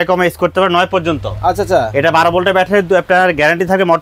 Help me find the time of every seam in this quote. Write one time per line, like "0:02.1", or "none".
none